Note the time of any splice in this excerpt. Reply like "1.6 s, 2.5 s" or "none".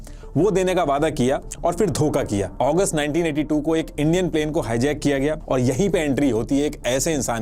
2.5 s, 5.4 s